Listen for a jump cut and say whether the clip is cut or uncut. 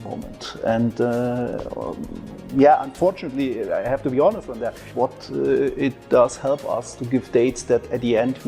cut